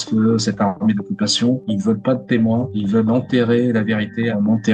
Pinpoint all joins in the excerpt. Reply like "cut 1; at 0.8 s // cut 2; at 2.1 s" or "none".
none

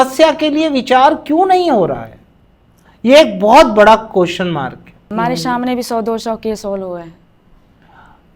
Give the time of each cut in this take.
cut 1; at 5.0 s

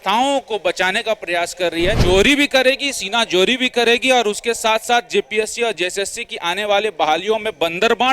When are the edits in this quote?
cut 1; at 2.0 s

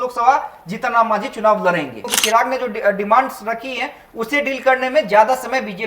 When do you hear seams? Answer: cut 1; at 2.1 s

